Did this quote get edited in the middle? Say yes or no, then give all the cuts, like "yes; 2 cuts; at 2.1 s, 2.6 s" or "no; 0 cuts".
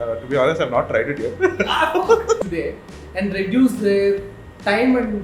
yes; 1 cut; at 2.4 s